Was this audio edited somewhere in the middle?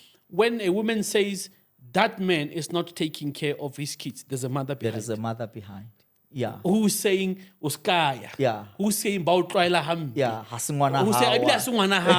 no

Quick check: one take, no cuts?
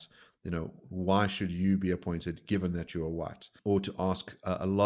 no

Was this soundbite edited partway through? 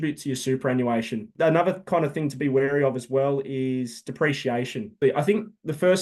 yes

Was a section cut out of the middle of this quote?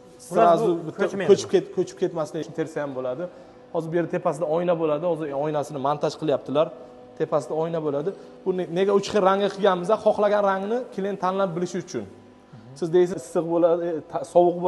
yes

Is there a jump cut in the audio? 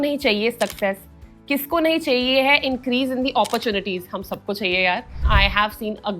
yes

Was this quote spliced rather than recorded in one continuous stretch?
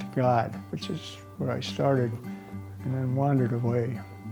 no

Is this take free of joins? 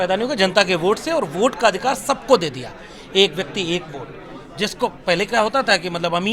yes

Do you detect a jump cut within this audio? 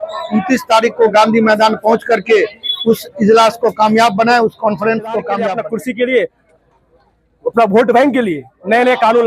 yes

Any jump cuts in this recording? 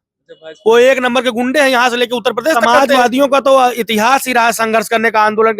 yes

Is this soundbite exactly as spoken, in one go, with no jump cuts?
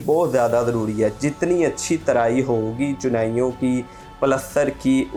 yes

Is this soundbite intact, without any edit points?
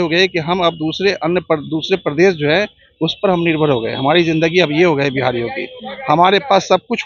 yes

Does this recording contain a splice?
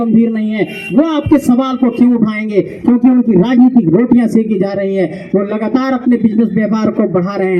no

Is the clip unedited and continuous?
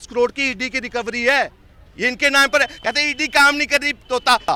yes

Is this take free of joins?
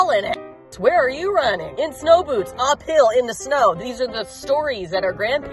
yes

